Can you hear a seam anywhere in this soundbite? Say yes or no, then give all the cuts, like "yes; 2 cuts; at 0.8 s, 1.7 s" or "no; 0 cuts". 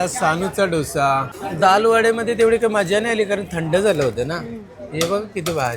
yes; 1 cut; at 1.4 s